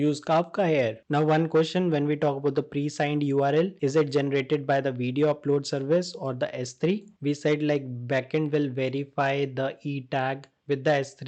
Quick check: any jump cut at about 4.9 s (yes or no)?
no